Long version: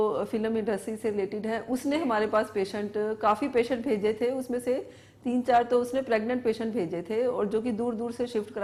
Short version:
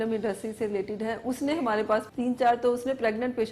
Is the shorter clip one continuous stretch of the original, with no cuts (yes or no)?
no